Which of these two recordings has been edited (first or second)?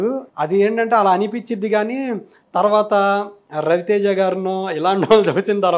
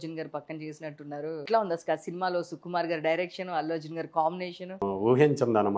second